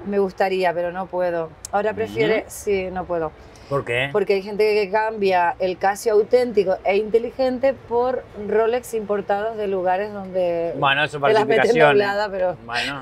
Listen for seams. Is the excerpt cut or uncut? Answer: uncut